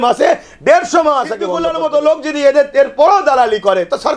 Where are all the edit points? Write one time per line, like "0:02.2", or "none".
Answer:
0:01.6

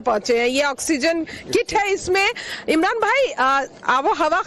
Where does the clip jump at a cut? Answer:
none

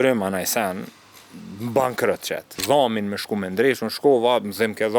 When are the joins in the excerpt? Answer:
0:02.6

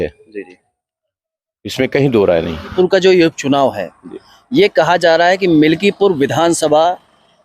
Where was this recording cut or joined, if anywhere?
0:02.7

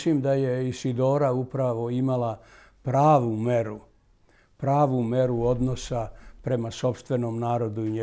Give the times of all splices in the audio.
none

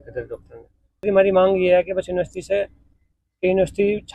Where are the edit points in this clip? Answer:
0:01.0

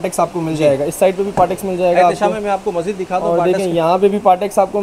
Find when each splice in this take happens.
none

